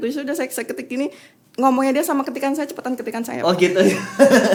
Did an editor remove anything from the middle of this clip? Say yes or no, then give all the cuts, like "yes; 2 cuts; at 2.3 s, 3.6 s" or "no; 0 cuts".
no; 0 cuts